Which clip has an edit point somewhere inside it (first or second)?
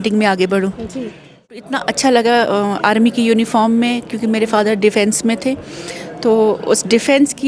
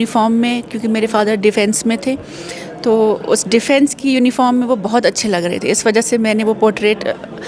first